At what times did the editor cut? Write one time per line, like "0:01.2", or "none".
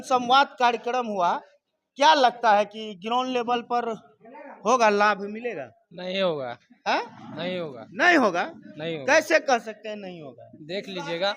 none